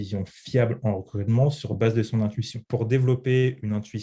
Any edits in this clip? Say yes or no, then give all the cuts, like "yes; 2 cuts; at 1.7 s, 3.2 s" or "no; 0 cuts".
yes; 1 cut; at 2.5 s